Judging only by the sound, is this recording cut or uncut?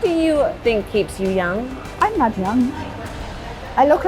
uncut